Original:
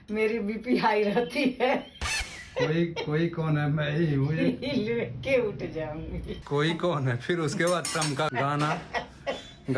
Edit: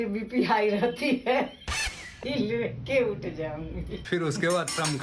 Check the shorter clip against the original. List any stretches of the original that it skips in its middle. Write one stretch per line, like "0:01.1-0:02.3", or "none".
0:02.5-0:04.6
0:06.4-0:07.2